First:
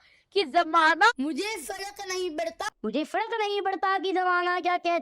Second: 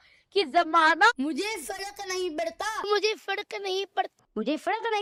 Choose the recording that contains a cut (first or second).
first